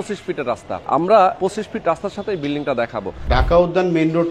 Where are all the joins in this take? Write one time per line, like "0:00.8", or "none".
0:00.8
0:01.4
0:03.2